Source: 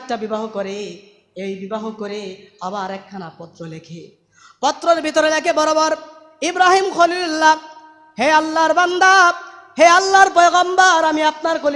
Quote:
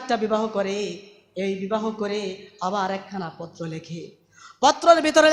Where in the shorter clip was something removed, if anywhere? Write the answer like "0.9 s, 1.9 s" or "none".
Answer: none

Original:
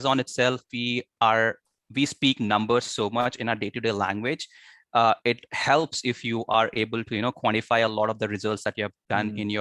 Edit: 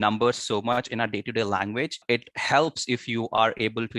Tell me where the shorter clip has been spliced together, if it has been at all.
2.0 s

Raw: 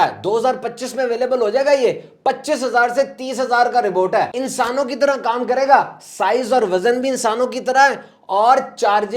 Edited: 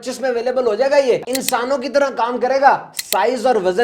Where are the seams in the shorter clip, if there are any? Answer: 1.3 s

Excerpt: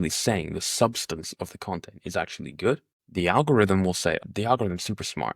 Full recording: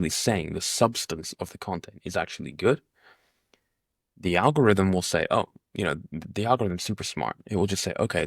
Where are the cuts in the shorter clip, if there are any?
3.0 s, 4.2 s

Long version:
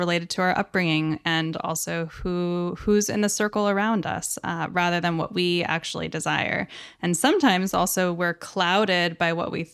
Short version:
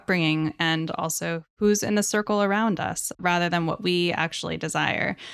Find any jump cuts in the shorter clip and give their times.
1.5 s, 3.1 s

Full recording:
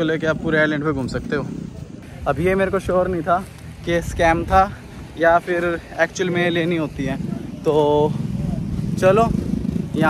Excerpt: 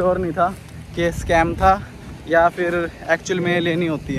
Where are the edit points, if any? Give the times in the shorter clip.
none

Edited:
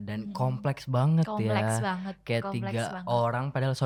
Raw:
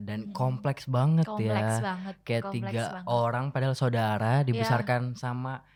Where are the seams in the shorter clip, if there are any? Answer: none

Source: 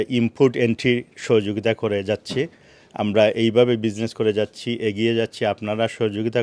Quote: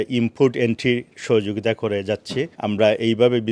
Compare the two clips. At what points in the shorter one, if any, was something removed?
2.5 s

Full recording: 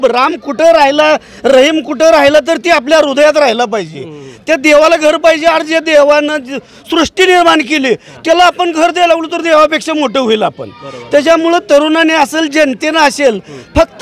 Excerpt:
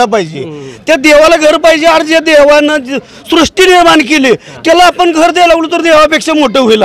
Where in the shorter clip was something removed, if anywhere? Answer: none

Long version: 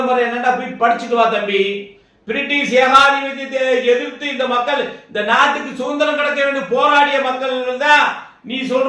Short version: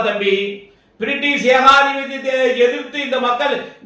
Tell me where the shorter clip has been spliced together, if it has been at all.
none

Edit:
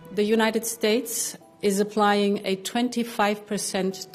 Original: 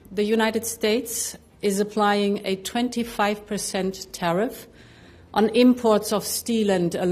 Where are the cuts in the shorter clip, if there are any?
none

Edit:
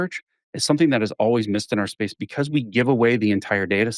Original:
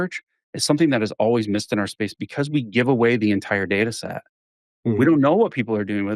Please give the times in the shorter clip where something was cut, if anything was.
none

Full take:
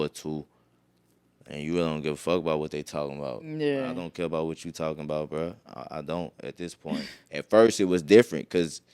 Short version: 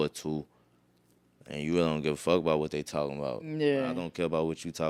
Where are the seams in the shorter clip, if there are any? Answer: none

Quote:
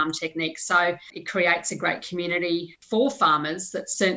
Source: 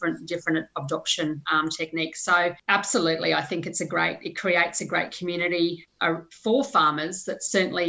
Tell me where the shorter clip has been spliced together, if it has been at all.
1.1 s, 2.8 s

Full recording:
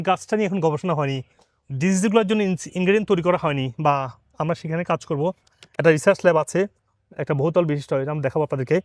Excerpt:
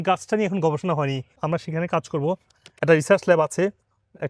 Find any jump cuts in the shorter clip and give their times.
1.3 s

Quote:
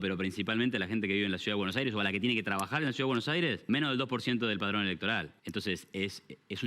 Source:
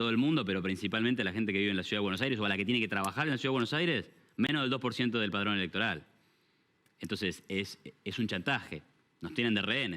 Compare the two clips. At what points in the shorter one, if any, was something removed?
3.8 s, 5.3 s

